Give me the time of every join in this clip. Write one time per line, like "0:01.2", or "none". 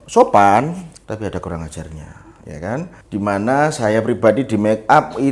0:00.9
0:03.0